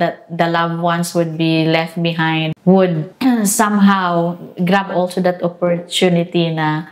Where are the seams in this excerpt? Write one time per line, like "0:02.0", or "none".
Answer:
0:02.5
0:03.1